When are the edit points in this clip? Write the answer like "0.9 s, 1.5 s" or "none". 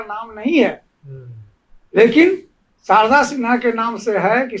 none